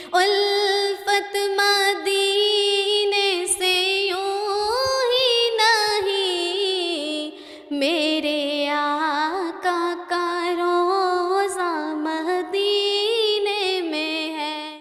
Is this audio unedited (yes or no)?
yes